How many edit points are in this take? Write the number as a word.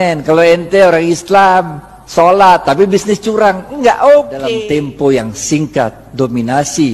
one